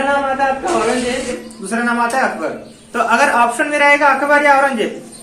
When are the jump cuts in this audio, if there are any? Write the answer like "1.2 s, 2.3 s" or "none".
1.7 s